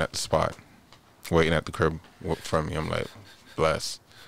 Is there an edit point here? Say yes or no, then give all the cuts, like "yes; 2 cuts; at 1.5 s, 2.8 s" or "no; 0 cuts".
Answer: no; 0 cuts